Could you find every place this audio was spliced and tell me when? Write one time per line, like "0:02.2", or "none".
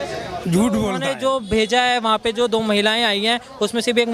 0:01.1